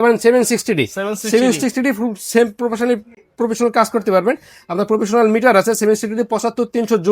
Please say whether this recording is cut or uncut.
uncut